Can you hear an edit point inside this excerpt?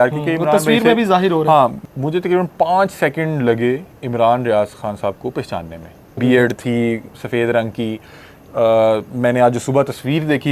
yes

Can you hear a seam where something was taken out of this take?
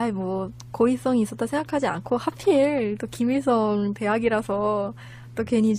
no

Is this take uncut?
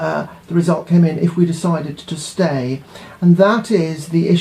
no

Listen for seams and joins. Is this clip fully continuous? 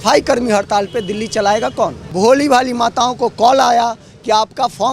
no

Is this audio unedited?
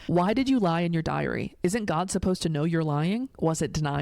yes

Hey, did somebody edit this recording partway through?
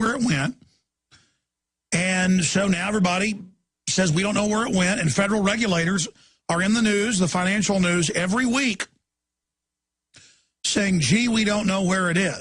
no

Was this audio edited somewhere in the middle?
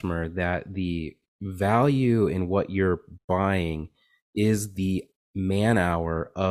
no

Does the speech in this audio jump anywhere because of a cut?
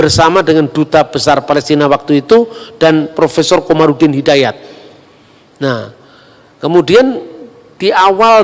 no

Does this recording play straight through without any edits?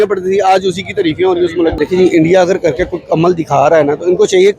no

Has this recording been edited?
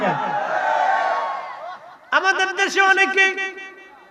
no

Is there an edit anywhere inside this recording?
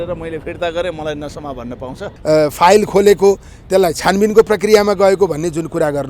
yes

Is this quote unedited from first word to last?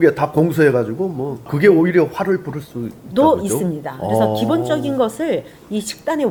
yes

